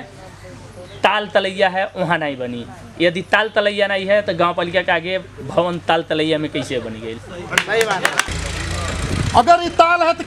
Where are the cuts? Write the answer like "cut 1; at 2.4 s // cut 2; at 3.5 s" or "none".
cut 1; at 8.2 s